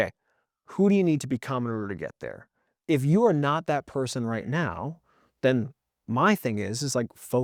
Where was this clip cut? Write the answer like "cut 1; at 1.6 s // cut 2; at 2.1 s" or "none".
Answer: none